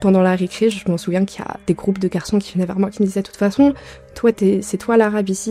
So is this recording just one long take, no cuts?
yes; 0 cuts

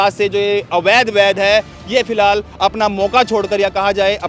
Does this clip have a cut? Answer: no; 0 cuts

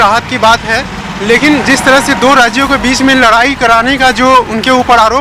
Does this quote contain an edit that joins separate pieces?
no; 0 cuts

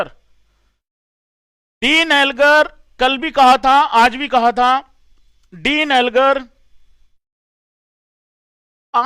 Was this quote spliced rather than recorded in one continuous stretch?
no; 0 cuts

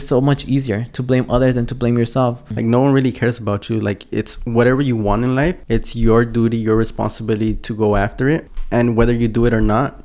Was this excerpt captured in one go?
no; 3 cuts; at 2.5 s, 5.6 s, 8.5 s

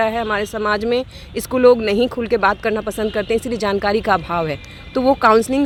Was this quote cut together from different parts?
no; 0 cuts

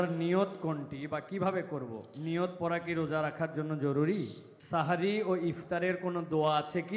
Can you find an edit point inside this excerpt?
yes; 1 cut; at 4.6 s

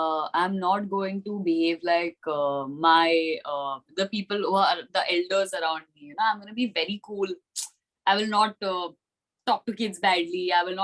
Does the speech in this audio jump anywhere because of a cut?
no; 0 cuts

